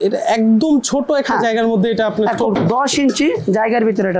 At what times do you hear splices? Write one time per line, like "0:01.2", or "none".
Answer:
0:02.5